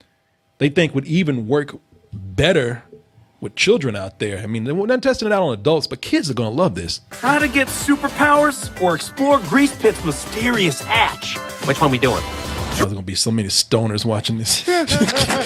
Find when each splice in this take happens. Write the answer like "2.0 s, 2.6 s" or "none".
none